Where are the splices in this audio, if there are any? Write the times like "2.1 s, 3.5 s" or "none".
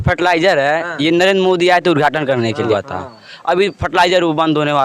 2.7 s